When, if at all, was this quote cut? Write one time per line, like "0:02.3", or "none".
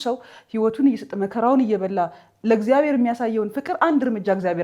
none

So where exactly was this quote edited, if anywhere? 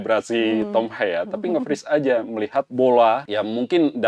0:02.6
0:03.3

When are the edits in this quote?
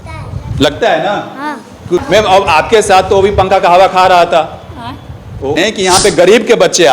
0:02.0
0:05.6

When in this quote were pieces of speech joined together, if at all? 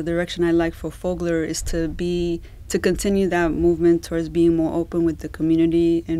none

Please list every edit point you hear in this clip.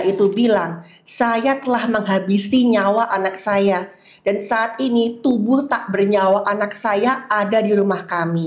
none

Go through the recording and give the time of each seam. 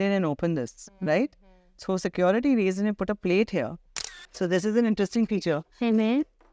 0:03.9

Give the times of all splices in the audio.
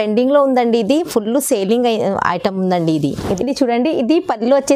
0:03.4

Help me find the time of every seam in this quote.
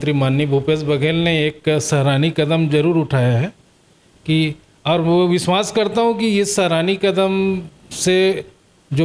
none

